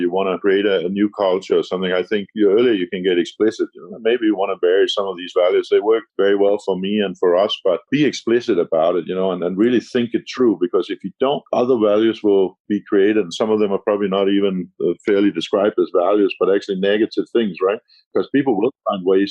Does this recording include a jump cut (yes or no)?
no